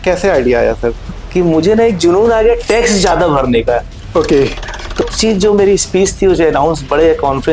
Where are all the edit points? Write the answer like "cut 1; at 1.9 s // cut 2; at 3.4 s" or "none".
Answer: cut 1; at 1.2 s // cut 2; at 5.0 s